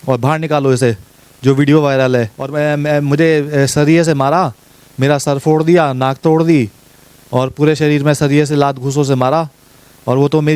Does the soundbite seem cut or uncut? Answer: cut